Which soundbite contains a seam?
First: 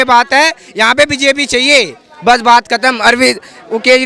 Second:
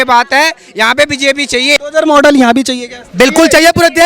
second; 1 cut; at 1.8 s

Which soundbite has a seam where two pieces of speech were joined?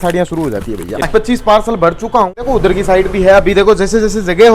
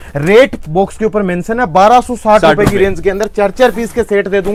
first; 2 cuts; at 1.1 s, 2.3 s

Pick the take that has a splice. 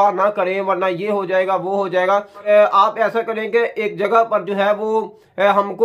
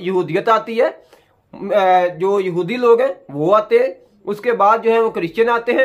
first; 1 cut; at 2.4 s

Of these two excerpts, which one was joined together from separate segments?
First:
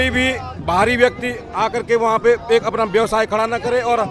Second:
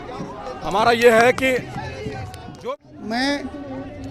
second; 1 cut; at 2.6 s

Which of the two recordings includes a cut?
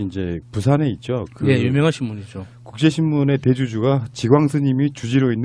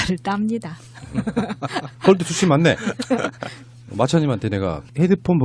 second; 1 cut; at 2.2 s

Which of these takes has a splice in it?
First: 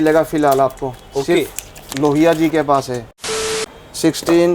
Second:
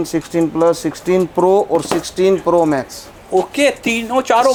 first; 1 cut; at 3.5 s

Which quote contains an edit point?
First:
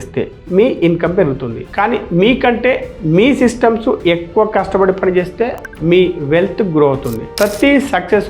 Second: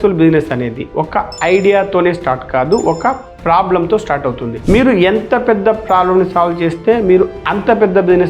first; 1 cut; at 7.3 s

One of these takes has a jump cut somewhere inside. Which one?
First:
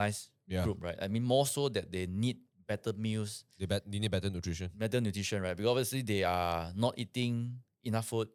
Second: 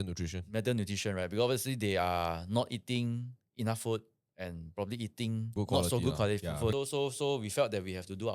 second; 2 cuts; at 5.5 s, 6.7 s

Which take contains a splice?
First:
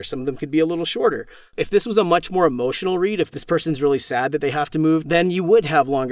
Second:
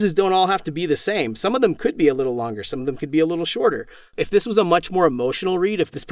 first; 1 cut; at 5.0 s

